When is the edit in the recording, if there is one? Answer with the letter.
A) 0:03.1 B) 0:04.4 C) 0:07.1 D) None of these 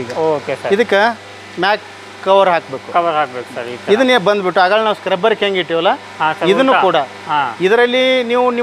D